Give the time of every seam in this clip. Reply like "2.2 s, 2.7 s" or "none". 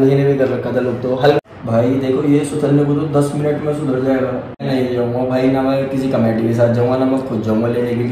1.4 s, 4.6 s